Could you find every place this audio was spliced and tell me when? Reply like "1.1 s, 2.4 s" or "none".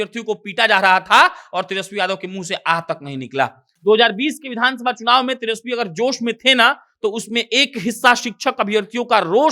3.7 s